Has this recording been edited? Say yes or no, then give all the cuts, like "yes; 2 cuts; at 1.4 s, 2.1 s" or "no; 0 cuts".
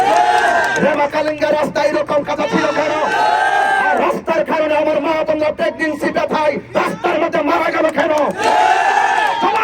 no; 0 cuts